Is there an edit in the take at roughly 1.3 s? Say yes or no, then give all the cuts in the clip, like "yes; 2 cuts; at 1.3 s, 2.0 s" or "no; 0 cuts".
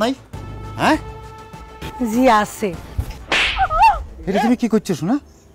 no; 1 cut; at 4.1 s